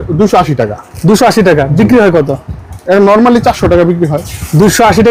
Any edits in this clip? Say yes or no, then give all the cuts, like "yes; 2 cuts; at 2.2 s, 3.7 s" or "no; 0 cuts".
no; 0 cuts